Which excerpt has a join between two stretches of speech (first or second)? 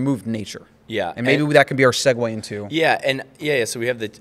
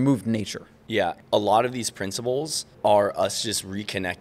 second